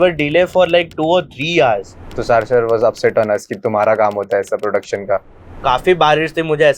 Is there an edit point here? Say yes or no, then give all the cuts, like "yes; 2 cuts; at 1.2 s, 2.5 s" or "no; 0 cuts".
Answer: yes; 2 cuts; at 2.0 s, 5.6 s